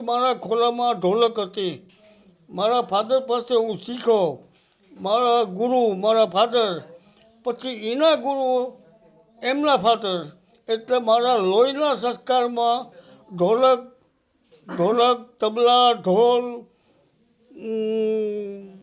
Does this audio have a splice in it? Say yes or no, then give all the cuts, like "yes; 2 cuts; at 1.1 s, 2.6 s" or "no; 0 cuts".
no; 0 cuts